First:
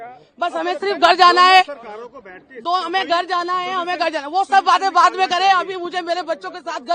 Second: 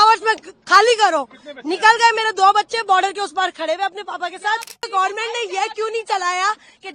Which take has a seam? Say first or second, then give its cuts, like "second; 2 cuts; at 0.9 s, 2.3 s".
second; 1 cut; at 4.9 s